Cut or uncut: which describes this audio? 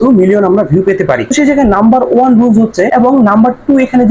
cut